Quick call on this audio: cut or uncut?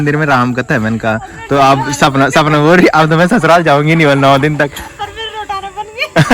uncut